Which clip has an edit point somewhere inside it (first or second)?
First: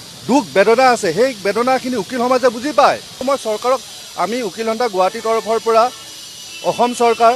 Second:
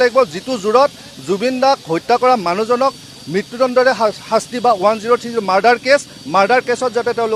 first